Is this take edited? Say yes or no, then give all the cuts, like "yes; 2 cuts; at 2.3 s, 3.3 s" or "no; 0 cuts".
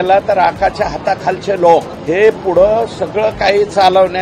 yes; 1 cut; at 2.0 s